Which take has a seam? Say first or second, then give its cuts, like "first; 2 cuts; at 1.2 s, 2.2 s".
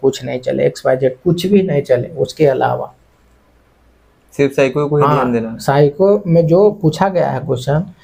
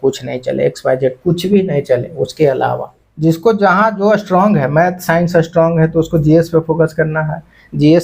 second; 1 cut; at 3.0 s